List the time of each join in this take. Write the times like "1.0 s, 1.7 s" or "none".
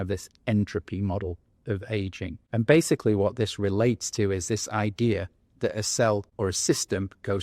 2.4 s, 6.3 s